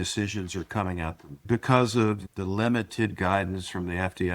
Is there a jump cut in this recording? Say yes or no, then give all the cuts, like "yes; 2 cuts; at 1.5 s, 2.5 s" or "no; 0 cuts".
yes; 1 cut; at 1.4 s